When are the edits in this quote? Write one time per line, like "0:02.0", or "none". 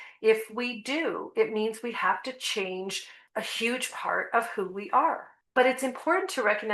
0:03.1
0:05.3